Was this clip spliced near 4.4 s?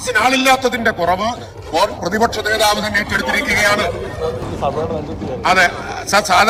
no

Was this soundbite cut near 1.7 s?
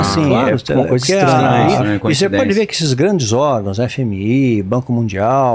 yes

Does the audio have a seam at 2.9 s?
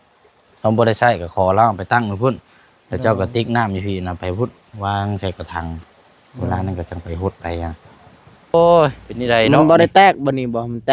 no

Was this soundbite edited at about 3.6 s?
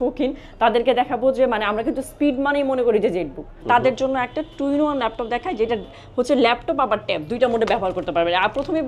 yes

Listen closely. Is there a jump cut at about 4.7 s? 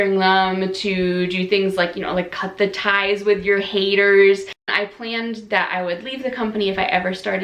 yes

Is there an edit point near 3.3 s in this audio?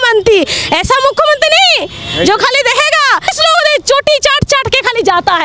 yes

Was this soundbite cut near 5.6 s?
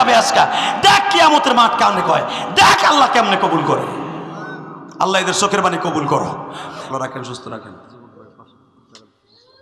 no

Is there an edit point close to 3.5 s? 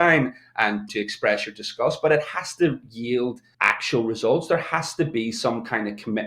yes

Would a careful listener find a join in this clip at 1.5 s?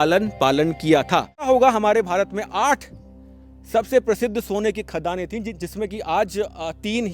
yes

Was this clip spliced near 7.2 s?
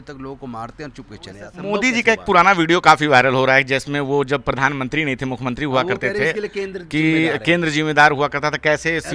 no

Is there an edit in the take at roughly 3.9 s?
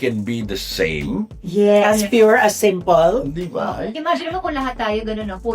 yes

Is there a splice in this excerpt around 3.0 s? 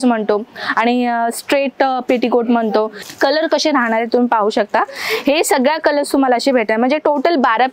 yes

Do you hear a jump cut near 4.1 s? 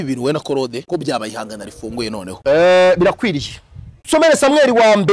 yes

